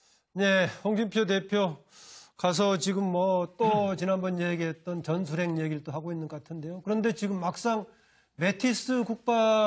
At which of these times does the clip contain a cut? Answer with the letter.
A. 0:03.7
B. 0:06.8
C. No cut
C